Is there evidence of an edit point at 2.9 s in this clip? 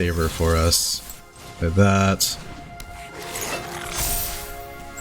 no; 0 cuts

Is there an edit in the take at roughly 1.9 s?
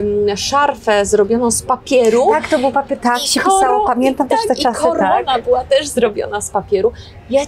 no; 0 cuts

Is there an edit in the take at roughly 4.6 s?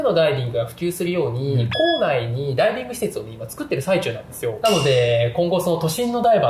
yes; 1 cut; at 4.6 s

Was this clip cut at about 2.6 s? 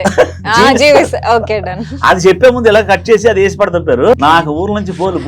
no; 1 cut; at 4.1 s

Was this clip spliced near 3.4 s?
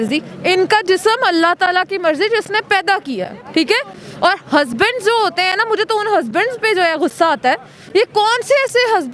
yes; 1 cut; at 3.4 s

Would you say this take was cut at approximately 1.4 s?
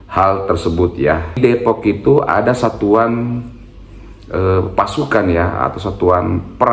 yes; 1 cut; at 1.4 s

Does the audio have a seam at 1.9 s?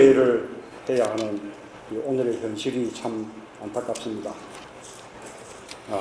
no; 0 cuts

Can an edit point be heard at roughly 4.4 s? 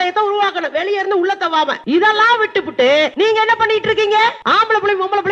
yes; 3 cuts; at 1.8 s, 3.1 s, 4.4 s

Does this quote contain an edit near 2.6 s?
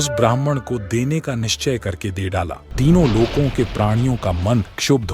yes; 1 cut; at 2.6 s

